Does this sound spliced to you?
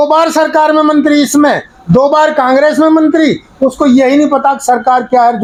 no; 0 cuts

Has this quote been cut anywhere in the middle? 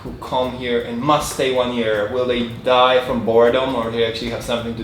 no; 0 cuts

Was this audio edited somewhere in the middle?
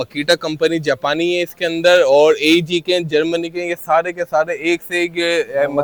no; 0 cuts

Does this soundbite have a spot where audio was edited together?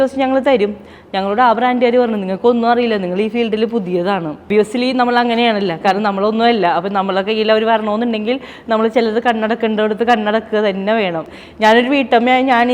yes; 2 cuts; at 4.5 s, 11.3 s

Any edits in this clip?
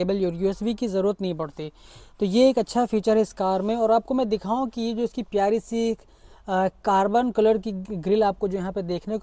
no; 0 cuts

